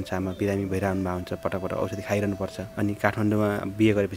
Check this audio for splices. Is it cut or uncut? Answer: cut